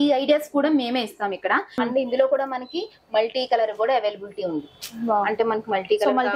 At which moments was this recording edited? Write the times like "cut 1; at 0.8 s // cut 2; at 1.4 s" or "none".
cut 1; at 1.8 s